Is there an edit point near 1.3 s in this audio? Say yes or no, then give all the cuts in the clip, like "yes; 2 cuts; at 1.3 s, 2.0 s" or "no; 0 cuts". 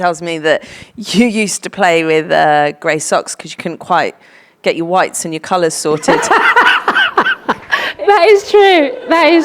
no; 1 cut; at 7.9 s